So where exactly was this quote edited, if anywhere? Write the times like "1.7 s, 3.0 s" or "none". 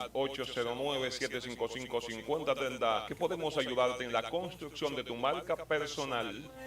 3.1 s